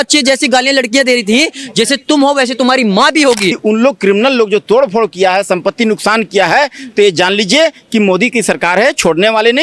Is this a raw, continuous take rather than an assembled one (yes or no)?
no